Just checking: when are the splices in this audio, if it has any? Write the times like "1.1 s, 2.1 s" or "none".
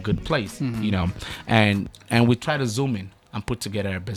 none